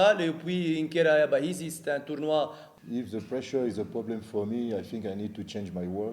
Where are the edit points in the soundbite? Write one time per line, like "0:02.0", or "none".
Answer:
0:02.6